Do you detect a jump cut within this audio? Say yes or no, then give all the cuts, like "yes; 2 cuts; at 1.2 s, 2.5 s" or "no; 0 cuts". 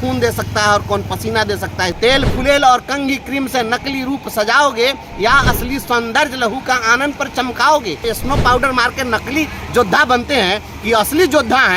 yes; 2 cuts; at 1.9 s, 8.0 s